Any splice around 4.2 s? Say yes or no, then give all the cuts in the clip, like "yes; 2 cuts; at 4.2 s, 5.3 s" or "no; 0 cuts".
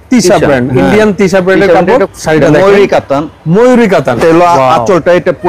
yes; 2 cuts; at 2.1 s, 4.2 s